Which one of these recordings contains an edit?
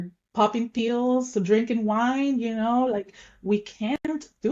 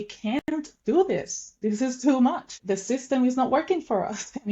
second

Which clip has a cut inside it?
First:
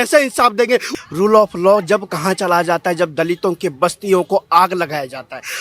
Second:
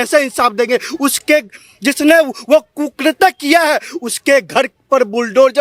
first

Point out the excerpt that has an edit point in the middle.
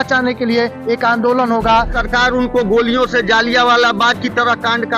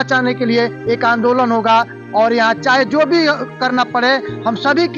first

